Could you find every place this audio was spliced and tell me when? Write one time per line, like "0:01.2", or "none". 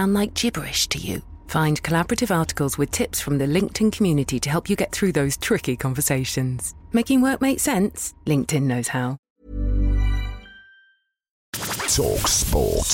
0:09.2
0:11.5